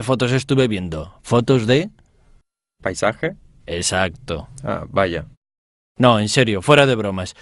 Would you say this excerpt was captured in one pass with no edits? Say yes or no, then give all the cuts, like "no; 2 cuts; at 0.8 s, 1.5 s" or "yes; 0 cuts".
yes; 0 cuts